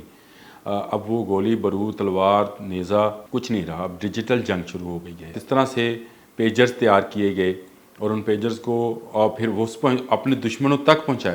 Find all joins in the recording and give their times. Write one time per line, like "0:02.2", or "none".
0:03.2
0:05.4